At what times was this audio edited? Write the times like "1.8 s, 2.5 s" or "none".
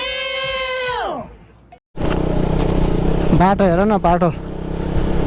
1.9 s